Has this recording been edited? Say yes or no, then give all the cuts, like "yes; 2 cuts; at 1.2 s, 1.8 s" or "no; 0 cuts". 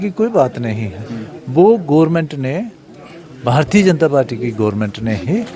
no; 0 cuts